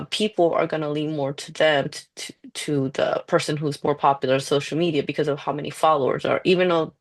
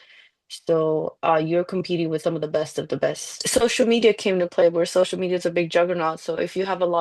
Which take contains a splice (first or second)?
second